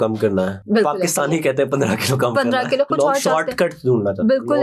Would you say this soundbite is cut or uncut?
cut